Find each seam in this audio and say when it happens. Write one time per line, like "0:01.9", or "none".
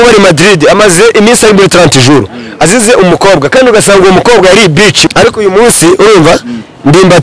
0:05.0